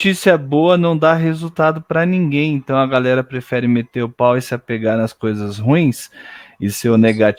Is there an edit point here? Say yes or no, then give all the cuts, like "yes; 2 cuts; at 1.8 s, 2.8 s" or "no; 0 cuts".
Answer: no; 0 cuts